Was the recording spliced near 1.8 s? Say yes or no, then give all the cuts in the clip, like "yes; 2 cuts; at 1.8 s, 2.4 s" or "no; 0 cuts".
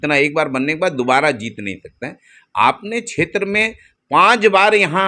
no; 0 cuts